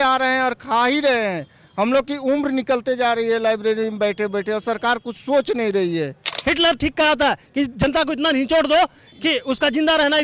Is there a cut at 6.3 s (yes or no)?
yes